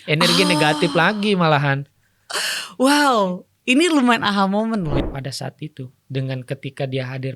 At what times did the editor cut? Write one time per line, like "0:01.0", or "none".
0:05.0